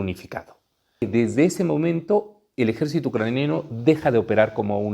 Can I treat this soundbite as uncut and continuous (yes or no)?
no